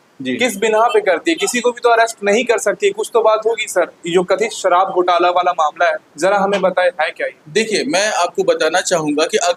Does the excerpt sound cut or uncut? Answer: uncut